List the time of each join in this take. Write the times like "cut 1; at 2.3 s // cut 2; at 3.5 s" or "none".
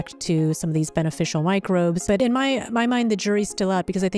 cut 1; at 2.2 s

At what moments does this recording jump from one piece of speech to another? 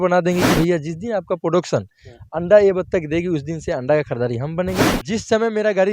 cut 1; at 4.8 s

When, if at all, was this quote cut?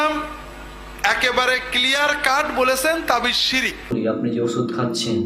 cut 1; at 3.9 s

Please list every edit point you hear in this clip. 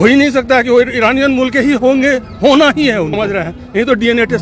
cut 1; at 3.2 s

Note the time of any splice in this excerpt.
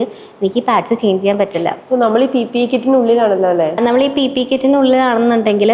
none

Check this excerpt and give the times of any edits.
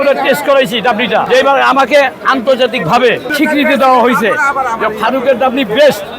cut 1; at 1.3 s // cut 2; at 3.3 s

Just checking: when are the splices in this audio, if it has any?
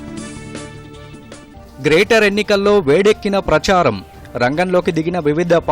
cut 1; at 1.6 s

